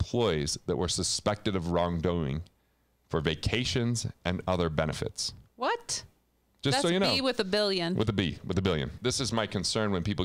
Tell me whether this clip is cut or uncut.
cut